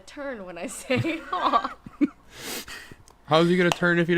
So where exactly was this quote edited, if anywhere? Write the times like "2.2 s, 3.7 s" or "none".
1.8 s